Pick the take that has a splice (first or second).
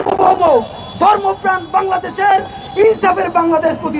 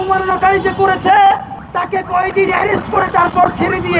second